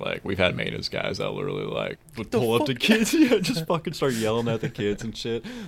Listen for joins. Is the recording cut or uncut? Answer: cut